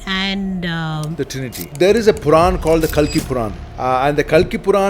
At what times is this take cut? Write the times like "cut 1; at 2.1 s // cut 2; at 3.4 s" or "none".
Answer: cut 1; at 1.7 s // cut 2; at 3.6 s